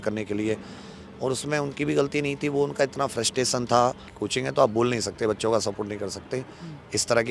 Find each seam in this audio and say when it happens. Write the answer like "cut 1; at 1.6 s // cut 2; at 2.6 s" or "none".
cut 1; at 4.1 s